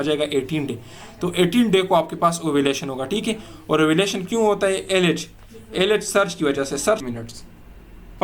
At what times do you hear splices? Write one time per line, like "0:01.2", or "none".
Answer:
0:07.1